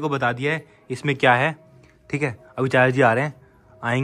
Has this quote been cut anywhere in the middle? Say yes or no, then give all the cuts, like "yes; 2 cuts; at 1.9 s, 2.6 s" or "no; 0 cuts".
no; 0 cuts